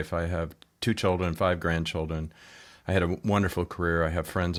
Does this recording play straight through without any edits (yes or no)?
yes